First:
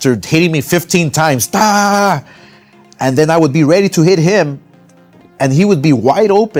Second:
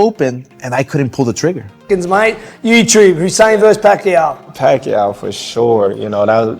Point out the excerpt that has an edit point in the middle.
second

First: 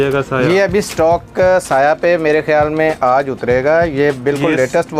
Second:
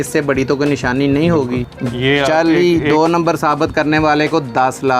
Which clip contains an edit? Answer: second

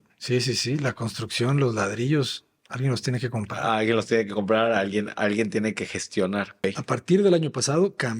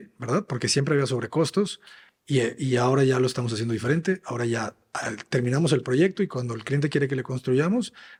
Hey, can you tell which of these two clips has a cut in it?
first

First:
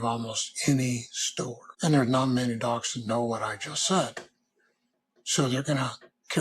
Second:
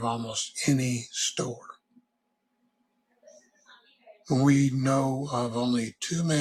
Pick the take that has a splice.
first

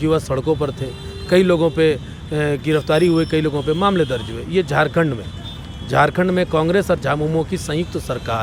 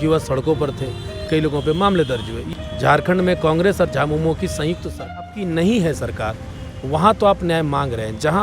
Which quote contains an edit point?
second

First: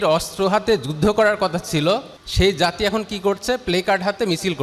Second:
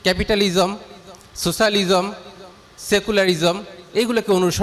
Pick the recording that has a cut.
first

